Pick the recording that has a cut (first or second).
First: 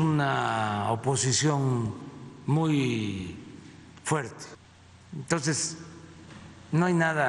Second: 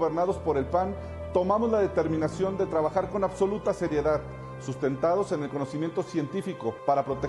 first